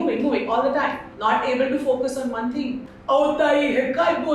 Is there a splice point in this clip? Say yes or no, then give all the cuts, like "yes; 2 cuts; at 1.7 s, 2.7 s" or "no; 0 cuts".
yes; 2 cuts; at 1.0 s, 2.9 s